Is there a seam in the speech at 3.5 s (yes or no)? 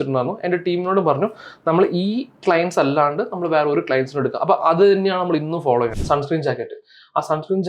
no